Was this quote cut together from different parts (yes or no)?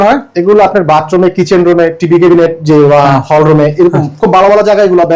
no